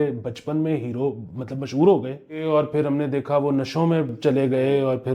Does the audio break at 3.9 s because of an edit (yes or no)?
no